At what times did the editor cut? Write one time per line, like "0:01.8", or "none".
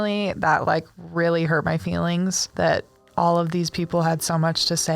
0:02.4